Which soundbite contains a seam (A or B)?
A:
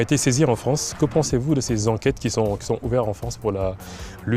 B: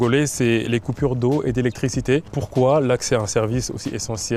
B